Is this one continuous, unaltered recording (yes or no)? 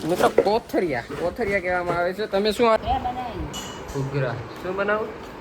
no